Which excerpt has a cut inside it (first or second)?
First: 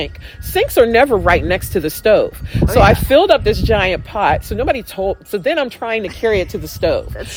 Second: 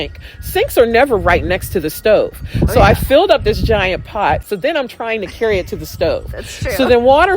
second